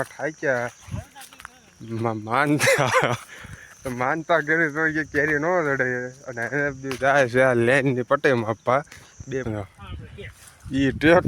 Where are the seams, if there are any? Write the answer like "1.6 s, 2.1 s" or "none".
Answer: 9.4 s